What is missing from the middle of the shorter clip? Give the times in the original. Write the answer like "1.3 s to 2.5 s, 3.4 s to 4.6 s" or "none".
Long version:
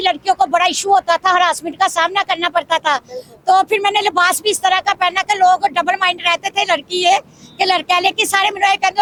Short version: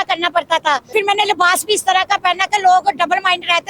3.1 s to 3.7 s